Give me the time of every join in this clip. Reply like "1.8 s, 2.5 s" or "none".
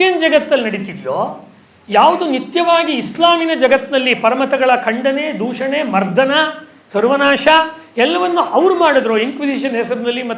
none